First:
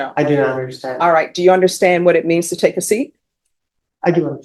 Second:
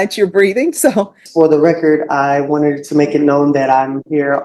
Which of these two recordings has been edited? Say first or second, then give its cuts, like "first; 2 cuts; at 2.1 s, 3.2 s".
second; 1 cut; at 1.2 s